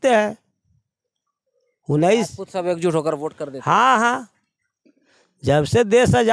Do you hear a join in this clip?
no; 0 cuts

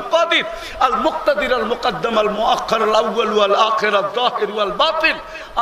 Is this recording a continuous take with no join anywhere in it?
yes; 0 cuts

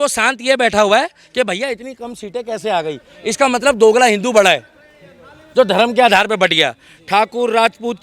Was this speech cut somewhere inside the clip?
no; 0 cuts

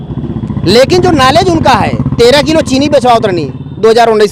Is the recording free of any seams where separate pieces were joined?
yes; 0 cuts

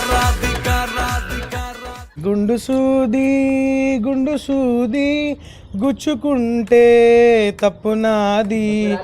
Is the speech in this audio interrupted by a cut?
yes; 1 cut; at 2.1 s

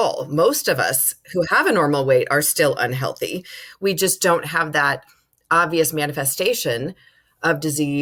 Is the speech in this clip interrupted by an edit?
no; 0 cuts

